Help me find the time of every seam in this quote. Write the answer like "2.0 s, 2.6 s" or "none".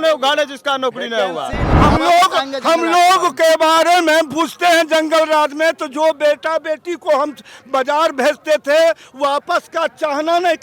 1.7 s